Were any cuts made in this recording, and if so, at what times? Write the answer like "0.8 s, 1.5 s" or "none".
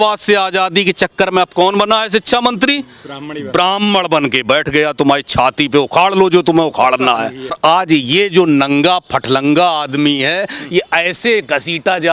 7.6 s